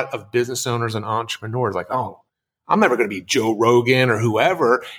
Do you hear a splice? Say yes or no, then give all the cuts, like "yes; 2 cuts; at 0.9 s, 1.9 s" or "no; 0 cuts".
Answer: no; 0 cuts